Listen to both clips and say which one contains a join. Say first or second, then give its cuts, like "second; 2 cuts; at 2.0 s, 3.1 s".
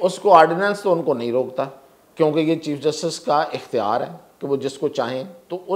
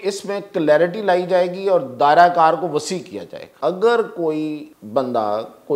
second; 2 cuts; at 3.4 s, 4.7 s